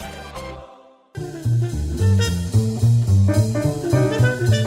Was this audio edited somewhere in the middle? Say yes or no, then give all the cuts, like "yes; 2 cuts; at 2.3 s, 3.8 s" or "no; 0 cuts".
yes; 1 cut; at 1.1 s